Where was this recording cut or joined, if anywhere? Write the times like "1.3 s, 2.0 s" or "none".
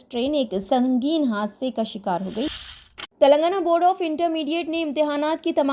2.5 s